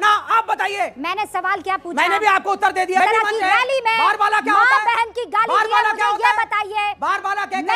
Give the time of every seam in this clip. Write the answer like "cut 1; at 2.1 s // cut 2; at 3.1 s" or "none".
cut 1; at 3.0 s